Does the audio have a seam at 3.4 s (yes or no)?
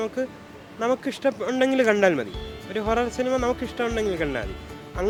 no